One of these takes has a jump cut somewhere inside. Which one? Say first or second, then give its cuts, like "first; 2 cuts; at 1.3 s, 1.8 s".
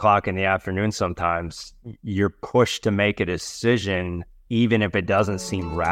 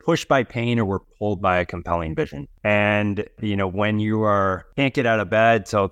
second; 3 cuts; at 2.5 s, 3.4 s, 4.6 s